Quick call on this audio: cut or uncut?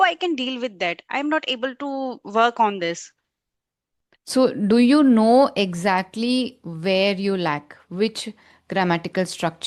uncut